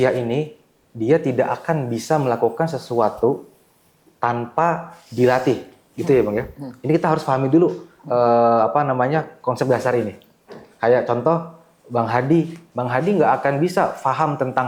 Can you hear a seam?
no; 0 cuts

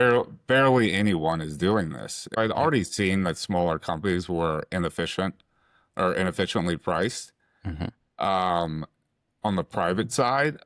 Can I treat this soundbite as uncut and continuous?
no; 1 cut; at 2.4 s

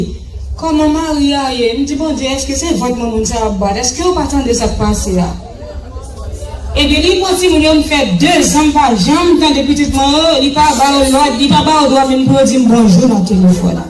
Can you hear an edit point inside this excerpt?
no; 0 cuts

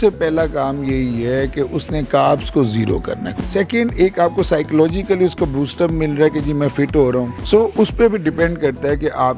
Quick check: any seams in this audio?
yes; 2 cuts; at 3.3 s, 7.3 s

